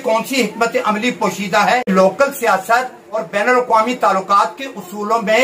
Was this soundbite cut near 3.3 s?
no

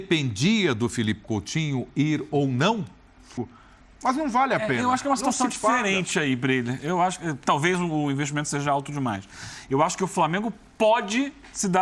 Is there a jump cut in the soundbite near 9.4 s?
no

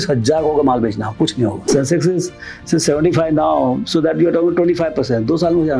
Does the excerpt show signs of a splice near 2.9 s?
no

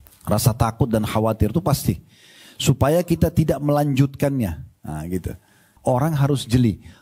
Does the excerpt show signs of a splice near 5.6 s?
yes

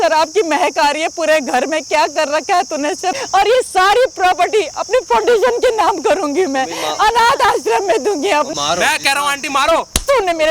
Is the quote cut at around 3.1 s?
yes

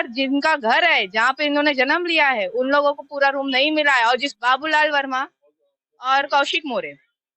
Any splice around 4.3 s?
yes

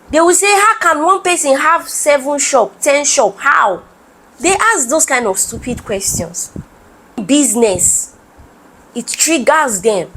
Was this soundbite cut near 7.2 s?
yes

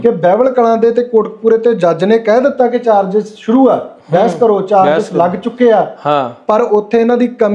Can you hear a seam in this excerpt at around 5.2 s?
no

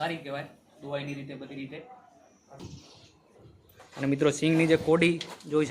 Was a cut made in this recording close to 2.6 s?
yes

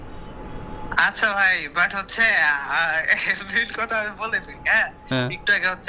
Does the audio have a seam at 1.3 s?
no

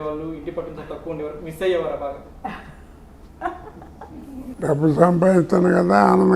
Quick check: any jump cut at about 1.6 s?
no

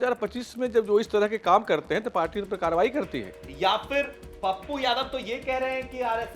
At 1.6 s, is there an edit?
no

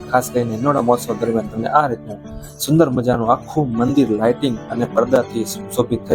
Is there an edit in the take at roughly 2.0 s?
no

